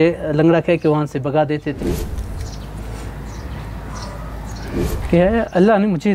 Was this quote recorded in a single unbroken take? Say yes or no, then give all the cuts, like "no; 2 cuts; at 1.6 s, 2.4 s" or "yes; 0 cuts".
no; 2 cuts; at 1.8 s, 5.0 s